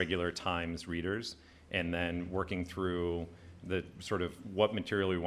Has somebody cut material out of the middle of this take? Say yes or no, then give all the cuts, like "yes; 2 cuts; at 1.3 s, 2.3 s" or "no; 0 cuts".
no; 0 cuts